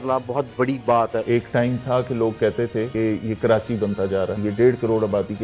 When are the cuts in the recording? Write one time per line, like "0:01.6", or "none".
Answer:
0:01.2
0:02.9
0:04.4